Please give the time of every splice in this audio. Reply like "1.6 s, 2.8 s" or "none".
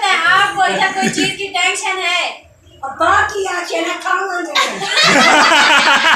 none